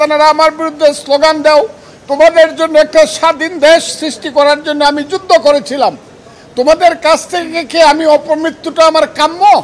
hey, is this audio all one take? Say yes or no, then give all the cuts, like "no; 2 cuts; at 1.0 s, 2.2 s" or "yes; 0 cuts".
yes; 0 cuts